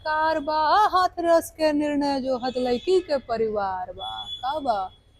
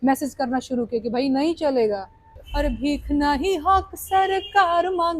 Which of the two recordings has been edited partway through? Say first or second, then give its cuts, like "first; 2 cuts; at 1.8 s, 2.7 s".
second; 1 cut; at 2.5 s